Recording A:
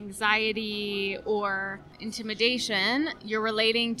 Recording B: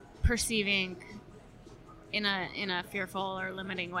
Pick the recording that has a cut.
A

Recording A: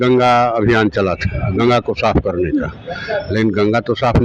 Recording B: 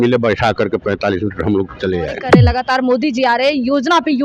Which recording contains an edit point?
B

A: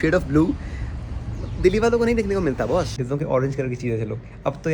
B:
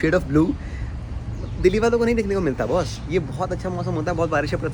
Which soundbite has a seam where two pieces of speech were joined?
A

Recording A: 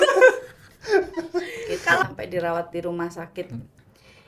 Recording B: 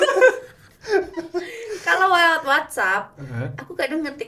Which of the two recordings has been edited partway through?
A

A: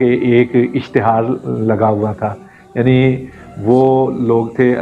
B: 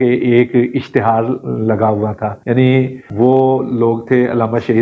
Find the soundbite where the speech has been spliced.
B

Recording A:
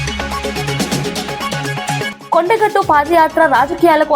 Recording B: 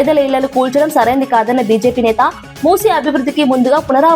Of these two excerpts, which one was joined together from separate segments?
A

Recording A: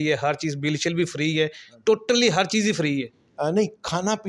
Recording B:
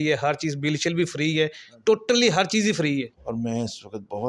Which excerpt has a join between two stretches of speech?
B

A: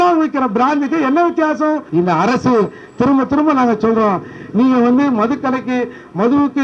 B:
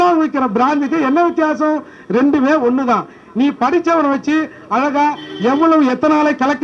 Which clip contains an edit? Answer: A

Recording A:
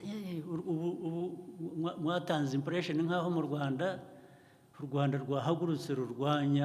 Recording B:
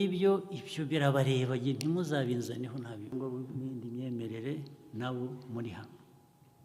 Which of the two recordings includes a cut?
B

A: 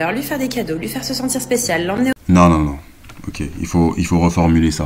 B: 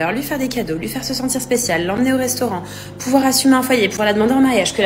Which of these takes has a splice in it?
B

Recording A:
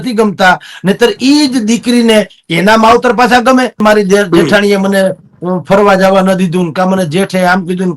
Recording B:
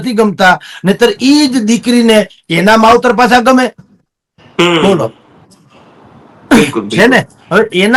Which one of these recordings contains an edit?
A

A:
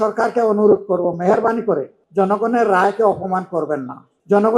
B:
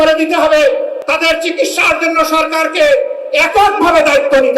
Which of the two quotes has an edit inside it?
B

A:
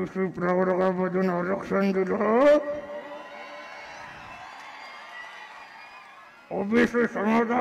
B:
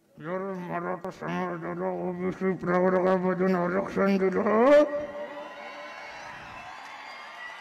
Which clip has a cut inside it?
B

